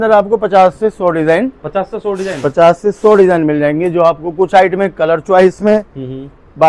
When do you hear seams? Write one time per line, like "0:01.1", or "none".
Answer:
none